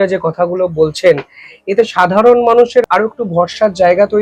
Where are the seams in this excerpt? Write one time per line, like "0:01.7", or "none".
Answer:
0:02.8